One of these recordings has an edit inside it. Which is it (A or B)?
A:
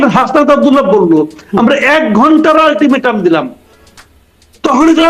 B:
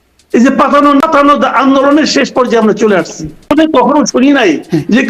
B